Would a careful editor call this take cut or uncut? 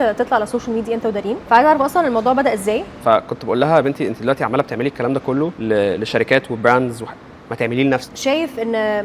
cut